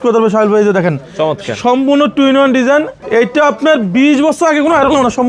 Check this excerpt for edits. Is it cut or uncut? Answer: cut